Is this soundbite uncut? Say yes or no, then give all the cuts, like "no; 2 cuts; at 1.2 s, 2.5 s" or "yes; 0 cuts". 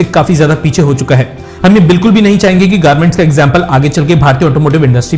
yes; 0 cuts